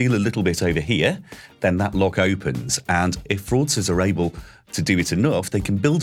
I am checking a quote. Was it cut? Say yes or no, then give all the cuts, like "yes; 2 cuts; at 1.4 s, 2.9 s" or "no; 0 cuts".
yes; 1 cut; at 3.2 s